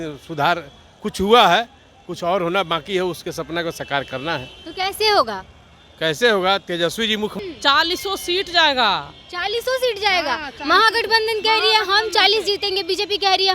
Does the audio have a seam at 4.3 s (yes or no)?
no